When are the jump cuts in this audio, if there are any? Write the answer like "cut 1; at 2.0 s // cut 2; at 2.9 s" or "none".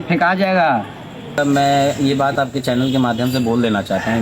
cut 1; at 1.4 s